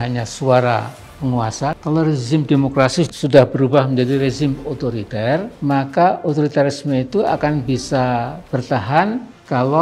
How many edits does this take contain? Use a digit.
2